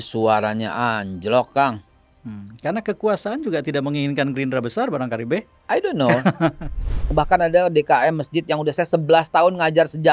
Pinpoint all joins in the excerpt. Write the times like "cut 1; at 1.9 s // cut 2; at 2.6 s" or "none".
cut 1; at 6.8 s